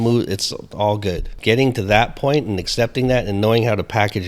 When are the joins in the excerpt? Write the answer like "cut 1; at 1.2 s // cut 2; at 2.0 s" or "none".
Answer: cut 1; at 1.3 s